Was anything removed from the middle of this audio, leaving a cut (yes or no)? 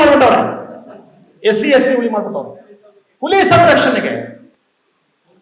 no